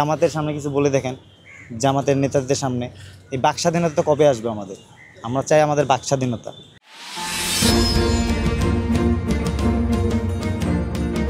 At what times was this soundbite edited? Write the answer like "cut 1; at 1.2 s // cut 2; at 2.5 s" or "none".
none